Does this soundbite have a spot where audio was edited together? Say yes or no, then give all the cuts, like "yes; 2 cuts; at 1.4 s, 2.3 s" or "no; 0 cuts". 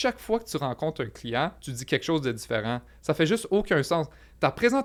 no; 0 cuts